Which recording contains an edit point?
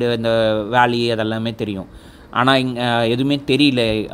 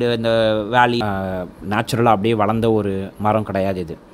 second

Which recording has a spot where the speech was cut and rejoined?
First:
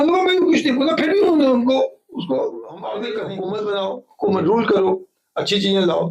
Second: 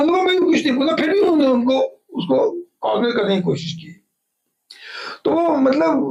first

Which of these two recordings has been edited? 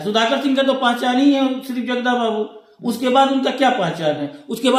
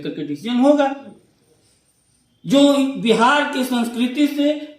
second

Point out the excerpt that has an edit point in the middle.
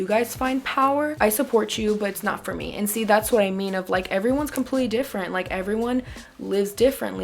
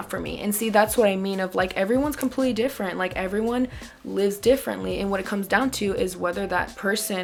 first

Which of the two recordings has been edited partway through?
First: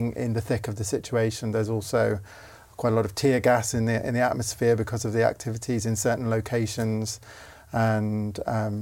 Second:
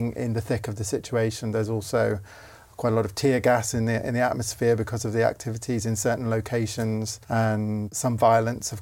second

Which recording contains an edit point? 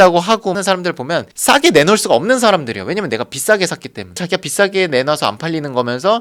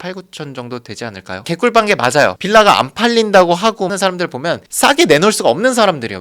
second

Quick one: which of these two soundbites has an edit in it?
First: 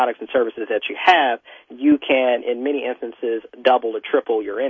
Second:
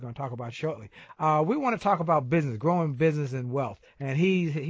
second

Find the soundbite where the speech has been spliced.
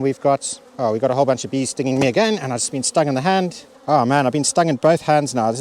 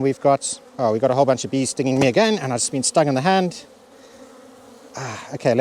first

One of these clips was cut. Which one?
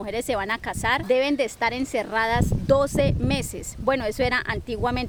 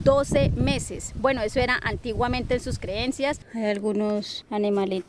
second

